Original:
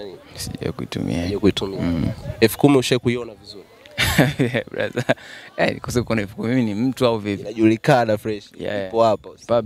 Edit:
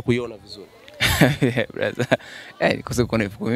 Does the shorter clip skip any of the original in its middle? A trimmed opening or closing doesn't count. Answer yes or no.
no